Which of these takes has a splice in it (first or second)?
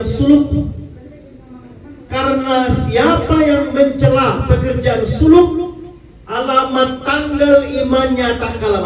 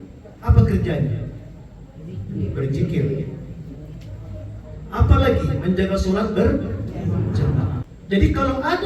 second